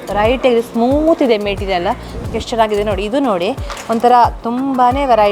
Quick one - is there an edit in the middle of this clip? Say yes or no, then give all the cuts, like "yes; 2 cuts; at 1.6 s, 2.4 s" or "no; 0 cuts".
yes; 1 cut; at 2.1 s